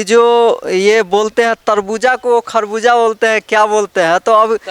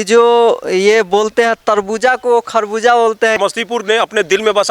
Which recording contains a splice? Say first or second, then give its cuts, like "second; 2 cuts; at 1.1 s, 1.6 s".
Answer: second; 1 cut; at 3.4 s